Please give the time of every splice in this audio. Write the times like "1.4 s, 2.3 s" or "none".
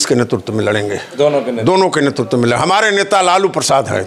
none